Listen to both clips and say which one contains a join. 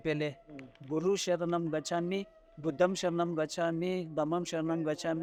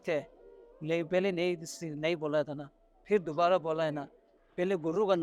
second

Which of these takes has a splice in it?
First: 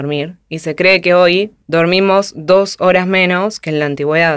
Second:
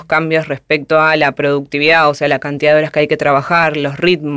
first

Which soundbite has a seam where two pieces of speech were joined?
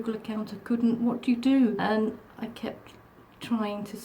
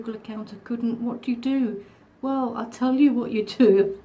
first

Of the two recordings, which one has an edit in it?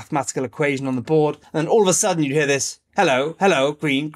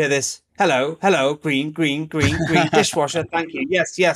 first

